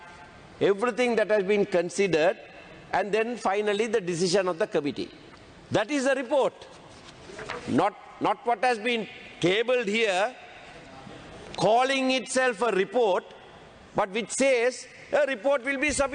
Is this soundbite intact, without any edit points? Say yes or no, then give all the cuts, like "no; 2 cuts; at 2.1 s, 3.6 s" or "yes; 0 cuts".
yes; 0 cuts